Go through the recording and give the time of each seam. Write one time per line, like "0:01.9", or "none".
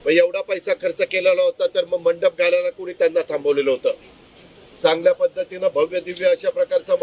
none